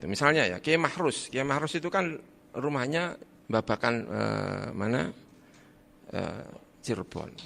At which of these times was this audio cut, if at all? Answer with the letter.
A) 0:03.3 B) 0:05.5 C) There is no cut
A